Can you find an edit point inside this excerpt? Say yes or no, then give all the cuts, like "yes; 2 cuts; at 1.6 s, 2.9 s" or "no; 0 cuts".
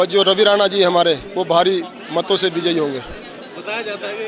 no; 0 cuts